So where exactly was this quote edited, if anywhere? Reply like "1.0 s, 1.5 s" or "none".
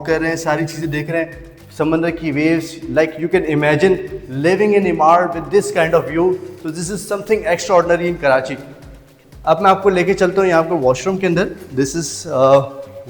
none